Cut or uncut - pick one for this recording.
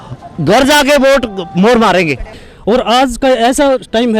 cut